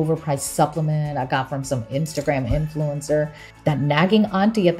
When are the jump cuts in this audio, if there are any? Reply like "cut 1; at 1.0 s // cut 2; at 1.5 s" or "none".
cut 1; at 3.5 s